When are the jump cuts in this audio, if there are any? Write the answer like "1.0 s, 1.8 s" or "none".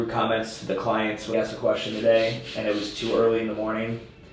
1.4 s